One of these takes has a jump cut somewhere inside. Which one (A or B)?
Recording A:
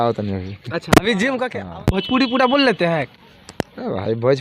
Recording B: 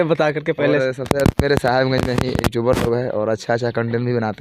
A